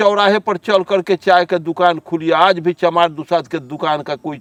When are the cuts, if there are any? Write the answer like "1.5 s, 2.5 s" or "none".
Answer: none